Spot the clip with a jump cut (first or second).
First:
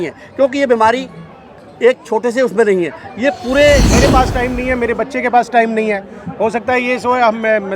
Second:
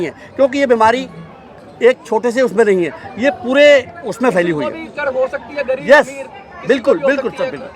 first